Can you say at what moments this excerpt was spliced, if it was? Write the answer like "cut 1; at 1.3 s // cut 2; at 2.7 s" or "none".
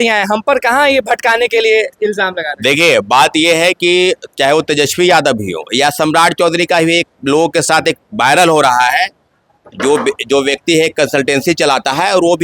none